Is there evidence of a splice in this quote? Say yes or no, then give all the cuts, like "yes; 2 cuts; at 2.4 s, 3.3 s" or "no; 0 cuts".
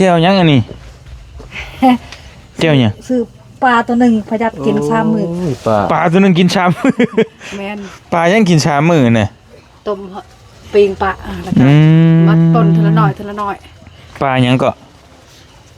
no; 0 cuts